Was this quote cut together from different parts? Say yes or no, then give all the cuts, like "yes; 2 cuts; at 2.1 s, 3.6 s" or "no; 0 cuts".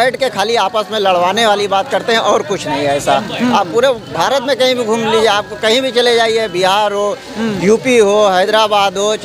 no; 0 cuts